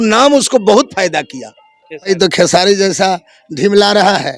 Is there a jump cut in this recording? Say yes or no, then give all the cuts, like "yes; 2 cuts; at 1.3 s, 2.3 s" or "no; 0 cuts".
yes; 1 cut; at 2.1 s